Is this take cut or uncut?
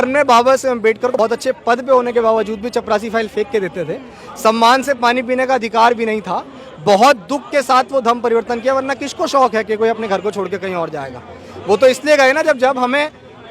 cut